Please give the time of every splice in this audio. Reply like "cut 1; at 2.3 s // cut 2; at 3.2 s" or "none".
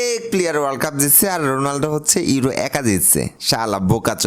cut 1; at 3.4 s